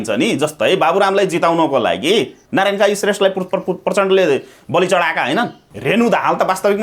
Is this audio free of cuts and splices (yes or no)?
no